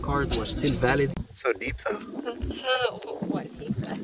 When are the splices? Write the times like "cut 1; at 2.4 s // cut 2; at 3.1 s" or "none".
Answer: cut 1; at 1.2 s